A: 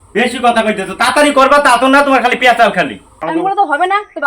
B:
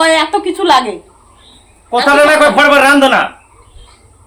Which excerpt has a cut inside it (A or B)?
A